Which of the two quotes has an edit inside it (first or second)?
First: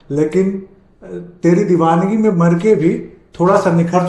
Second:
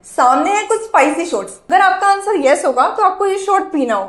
second